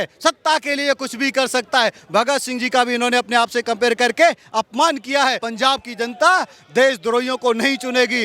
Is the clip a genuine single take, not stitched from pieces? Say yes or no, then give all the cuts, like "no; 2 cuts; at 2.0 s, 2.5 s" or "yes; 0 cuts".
no; 1 cut; at 5.5 s